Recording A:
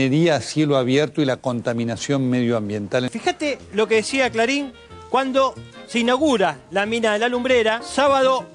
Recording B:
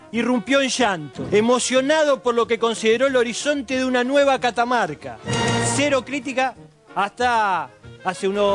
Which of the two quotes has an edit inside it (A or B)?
A